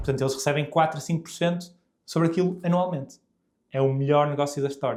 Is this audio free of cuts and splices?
yes; 0 cuts

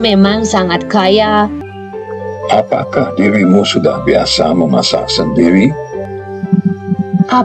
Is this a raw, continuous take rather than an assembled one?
no; 1 cut; at 1.6 s

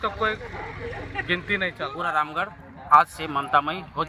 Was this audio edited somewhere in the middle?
yes; 1 cut; at 1.9 s

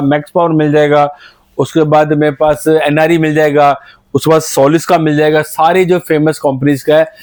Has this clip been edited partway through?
no; 0 cuts

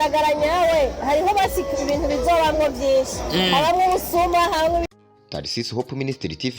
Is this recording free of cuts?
no; 1 cut; at 4.9 s

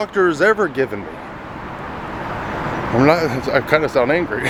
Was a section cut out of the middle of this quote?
no; 0 cuts

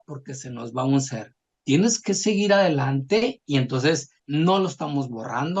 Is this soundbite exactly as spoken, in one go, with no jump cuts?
no; 1 cut; at 4.2 s

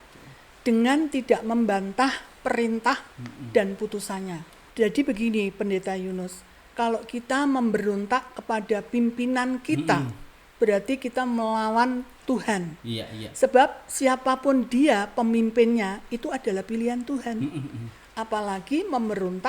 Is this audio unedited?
no; 1 cut; at 4.6 s

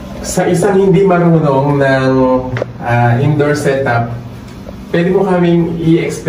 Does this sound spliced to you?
no; 0 cuts

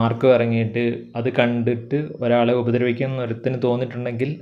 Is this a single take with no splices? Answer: yes; 0 cuts

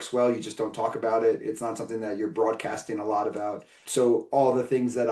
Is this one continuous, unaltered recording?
no; 1 cut; at 3.8 s

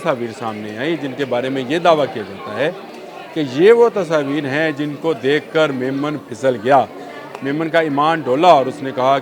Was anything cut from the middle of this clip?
no; 0 cuts

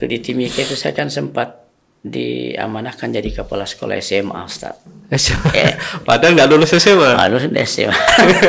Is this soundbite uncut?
yes; 0 cuts

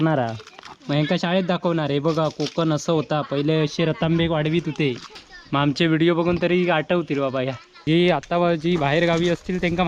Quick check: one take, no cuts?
no; 1 cut; at 7.7 s

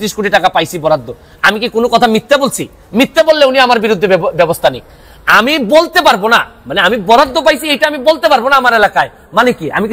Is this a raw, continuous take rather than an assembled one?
yes; 0 cuts

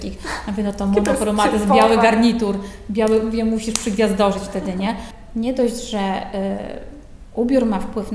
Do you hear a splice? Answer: yes; 1 cut; at 5.2 s

